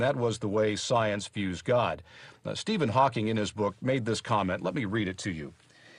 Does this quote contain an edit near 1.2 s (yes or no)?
yes